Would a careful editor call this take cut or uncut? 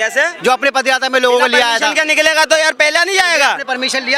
uncut